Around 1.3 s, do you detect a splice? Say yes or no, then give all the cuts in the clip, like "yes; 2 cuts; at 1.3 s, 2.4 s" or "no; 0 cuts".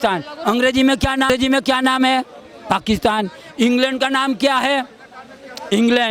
yes; 1 cut; at 1.3 s